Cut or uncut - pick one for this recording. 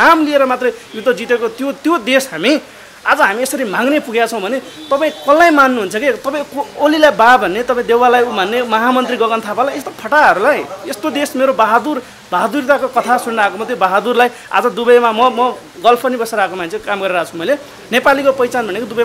uncut